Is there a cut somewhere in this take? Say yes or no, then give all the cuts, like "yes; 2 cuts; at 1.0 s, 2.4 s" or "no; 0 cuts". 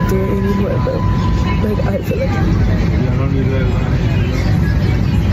no; 0 cuts